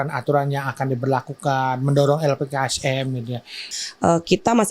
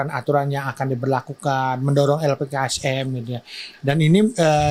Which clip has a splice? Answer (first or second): first